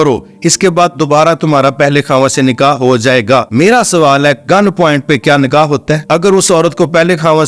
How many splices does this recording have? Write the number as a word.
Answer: two